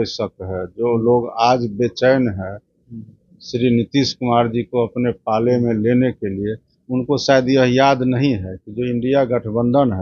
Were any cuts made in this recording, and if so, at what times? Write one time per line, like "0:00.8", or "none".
none